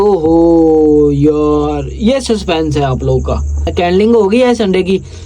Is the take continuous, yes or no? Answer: no